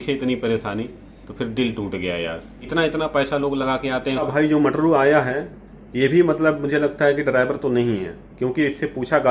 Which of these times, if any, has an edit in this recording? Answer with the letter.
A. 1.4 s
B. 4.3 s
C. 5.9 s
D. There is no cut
B